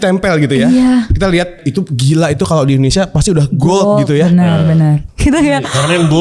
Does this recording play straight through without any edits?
no; 2 cuts; at 1.6 s, 5.1 s

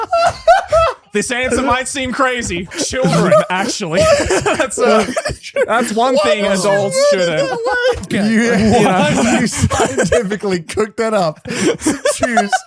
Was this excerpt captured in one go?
no; 2 cuts; at 2.8 s, 8.1 s

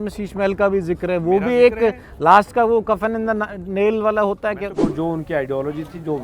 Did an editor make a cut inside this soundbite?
yes; 1 cut; at 4.8 s

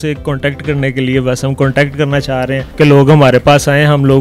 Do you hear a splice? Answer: yes; 1 cut; at 2.7 s

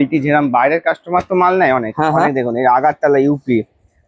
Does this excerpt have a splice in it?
no; 0 cuts

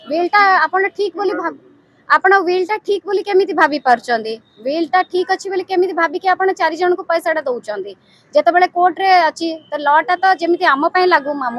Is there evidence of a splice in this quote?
no; 0 cuts

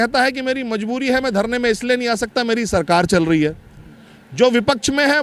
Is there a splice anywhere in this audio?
no; 0 cuts

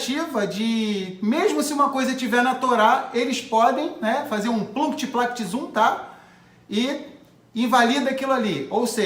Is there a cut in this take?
no; 0 cuts

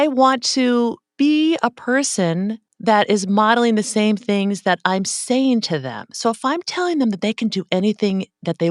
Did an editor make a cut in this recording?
yes; 2 cuts; at 1.0 s, 2.7 s

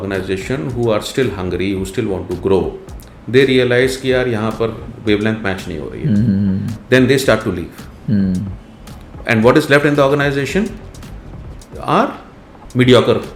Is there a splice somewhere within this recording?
no; 0 cuts

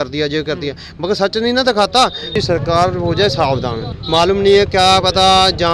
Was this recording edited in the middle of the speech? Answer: yes; 2 cuts; at 2.4 s, 3.8 s

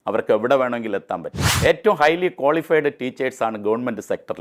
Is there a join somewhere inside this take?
yes; 1 cut; at 1.5 s

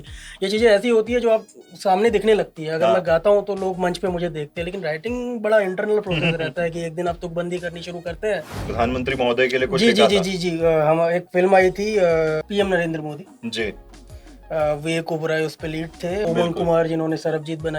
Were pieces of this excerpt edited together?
yes; 3 cuts; at 8.6 s, 12.5 s, 16.2 s

